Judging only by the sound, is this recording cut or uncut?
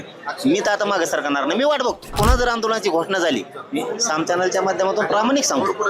cut